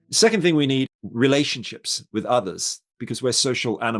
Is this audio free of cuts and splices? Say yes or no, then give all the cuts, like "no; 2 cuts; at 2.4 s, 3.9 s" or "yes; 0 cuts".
no; 1 cut; at 0.9 s